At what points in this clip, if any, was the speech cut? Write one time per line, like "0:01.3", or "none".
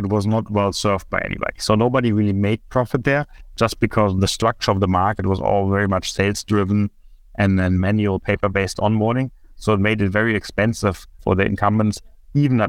0:11.1